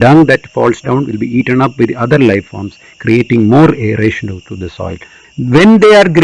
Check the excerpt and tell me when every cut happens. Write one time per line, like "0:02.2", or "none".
0:05.2

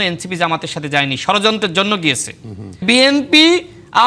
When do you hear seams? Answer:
0:02.8

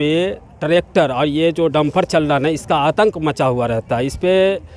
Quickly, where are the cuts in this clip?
none

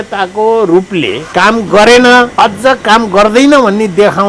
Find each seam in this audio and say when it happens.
0:01.2
0:02.3

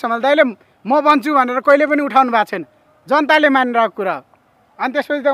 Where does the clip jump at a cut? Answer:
none

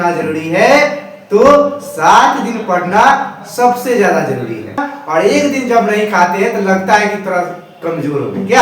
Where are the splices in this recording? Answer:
0:04.9

